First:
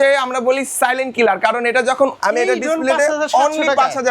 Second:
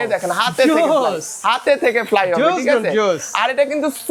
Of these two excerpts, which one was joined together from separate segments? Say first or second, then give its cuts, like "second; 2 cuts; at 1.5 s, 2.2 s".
first; 1 cut; at 2.2 s